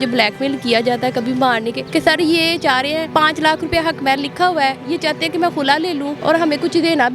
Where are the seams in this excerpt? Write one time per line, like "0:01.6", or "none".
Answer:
0:01.8
0:03.1
0:06.1